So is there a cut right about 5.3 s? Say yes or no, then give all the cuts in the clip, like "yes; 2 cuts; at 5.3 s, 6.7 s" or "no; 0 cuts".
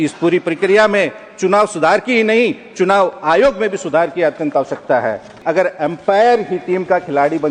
yes; 1 cut; at 5.3 s